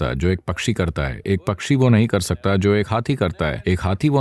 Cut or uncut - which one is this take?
uncut